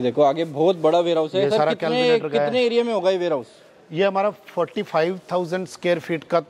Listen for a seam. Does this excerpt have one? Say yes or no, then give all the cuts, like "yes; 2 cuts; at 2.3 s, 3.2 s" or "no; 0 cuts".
no; 0 cuts